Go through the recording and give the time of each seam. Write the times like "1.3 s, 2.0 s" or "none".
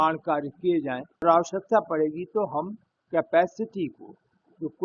1.2 s